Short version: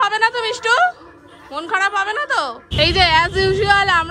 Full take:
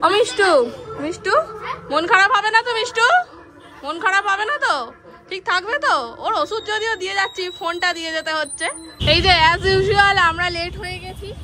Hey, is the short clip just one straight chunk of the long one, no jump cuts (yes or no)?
no